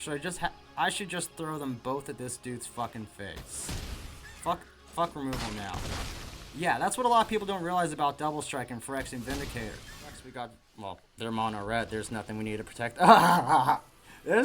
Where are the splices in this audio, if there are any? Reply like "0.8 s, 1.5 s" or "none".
10.2 s